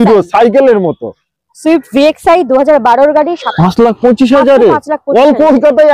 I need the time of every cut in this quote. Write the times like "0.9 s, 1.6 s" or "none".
3.4 s